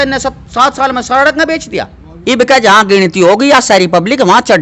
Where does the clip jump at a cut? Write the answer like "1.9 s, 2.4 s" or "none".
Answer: 2.2 s